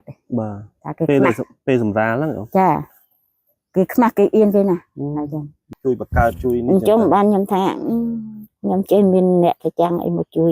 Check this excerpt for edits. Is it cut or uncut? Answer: cut